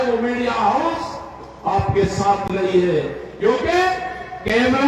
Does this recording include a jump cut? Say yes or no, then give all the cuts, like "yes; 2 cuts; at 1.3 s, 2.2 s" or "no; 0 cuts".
no; 0 cuts